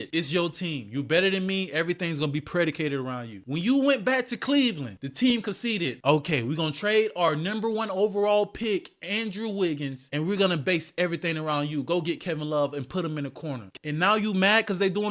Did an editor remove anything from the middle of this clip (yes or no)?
yes